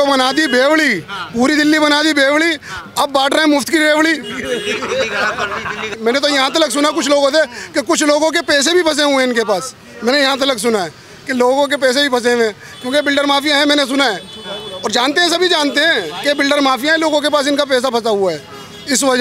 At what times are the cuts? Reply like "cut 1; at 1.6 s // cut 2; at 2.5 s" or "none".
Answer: cut 1; at 5.9 s